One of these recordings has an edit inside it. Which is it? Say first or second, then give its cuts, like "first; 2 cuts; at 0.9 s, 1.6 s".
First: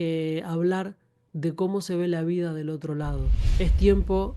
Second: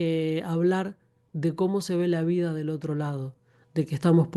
first; 1 cut; at 3.4 s